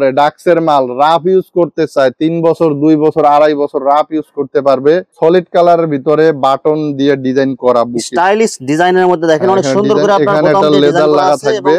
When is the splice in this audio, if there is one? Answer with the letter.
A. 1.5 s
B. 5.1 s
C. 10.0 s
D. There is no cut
B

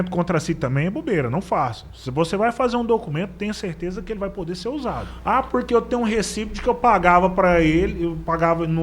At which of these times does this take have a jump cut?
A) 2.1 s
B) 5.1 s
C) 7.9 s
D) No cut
B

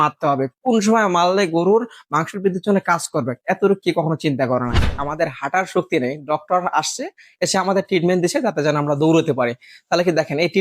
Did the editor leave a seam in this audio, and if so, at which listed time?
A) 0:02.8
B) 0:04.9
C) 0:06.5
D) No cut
B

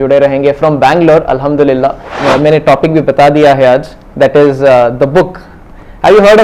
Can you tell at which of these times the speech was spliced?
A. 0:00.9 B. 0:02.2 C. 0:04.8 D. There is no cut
B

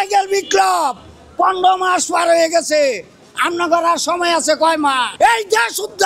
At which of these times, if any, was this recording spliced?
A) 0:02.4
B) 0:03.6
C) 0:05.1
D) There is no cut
C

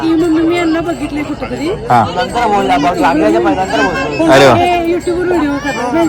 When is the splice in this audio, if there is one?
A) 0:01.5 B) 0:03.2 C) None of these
C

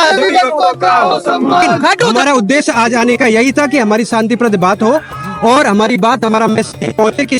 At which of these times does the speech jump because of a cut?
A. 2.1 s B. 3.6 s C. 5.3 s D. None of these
A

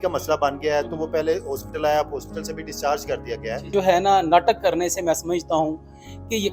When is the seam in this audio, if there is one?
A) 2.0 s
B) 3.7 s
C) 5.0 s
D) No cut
B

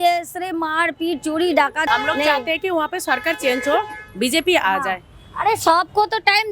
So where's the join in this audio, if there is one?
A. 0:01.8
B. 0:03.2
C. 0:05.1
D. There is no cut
A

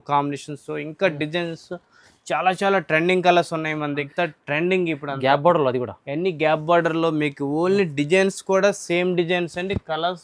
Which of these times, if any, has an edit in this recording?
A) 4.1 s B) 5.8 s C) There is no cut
A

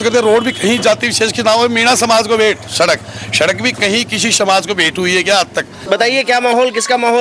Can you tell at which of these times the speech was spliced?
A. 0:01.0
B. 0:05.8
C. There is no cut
B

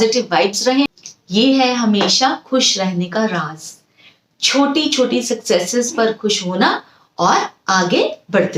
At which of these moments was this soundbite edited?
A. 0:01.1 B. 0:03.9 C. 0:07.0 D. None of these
A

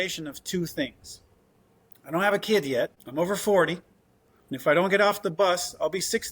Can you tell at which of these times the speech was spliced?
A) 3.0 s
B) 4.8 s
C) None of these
A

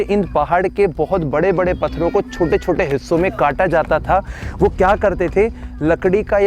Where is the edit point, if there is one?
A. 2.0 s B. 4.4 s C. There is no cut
C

